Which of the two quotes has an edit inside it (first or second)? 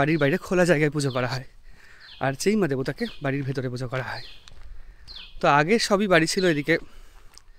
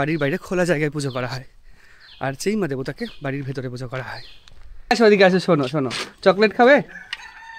second